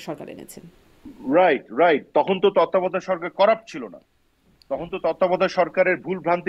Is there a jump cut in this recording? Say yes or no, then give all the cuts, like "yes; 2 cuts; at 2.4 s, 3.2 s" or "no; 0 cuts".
no; 0 cuts